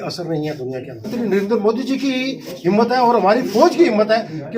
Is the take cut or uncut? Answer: cut